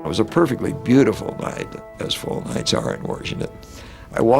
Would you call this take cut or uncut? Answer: cut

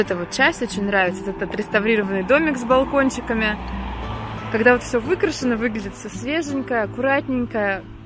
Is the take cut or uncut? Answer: uncut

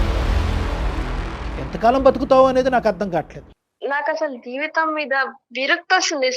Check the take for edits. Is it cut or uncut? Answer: cut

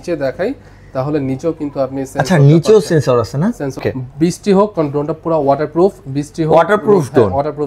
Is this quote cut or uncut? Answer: cut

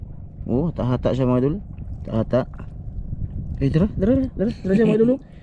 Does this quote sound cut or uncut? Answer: uncut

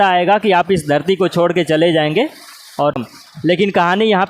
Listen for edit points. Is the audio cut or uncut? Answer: cut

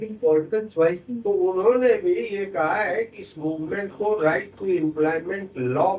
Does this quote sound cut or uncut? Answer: cut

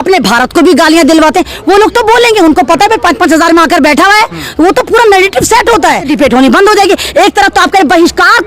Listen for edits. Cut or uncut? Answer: cut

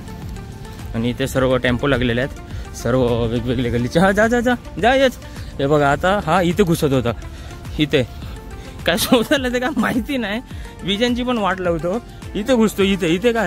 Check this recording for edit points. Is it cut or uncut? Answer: uncut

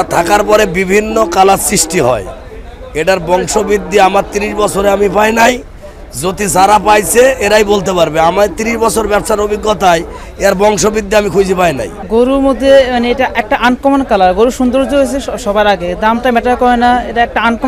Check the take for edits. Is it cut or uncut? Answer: cut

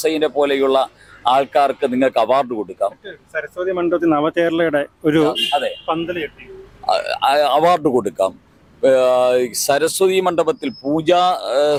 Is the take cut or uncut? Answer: uncut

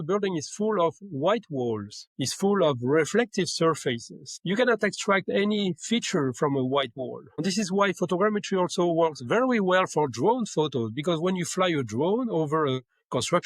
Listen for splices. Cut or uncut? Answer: cut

